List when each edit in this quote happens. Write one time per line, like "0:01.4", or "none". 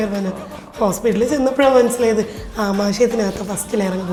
none